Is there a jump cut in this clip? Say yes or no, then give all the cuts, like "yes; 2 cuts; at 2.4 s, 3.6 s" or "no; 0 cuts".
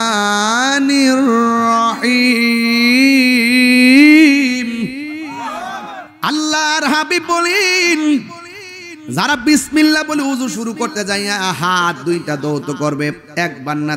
yes; 1 cut; at 6.1 s